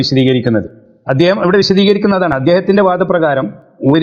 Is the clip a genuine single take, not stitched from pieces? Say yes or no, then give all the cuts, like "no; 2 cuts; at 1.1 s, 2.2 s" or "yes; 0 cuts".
no; 1 cut; at 2.2 s